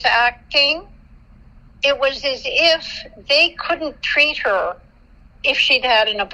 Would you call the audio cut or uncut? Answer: uncut